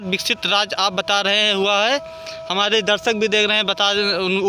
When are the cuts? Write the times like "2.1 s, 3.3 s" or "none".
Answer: none